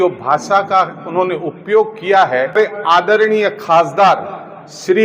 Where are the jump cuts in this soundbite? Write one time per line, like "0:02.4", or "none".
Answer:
0:02.6